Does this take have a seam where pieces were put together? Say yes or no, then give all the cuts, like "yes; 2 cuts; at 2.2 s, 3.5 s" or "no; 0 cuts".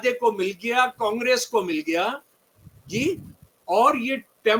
no; 0 cuts